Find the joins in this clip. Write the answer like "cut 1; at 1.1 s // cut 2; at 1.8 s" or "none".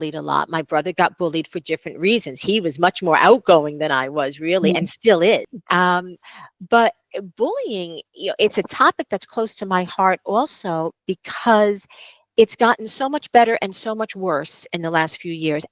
cut 1; at 5.6 s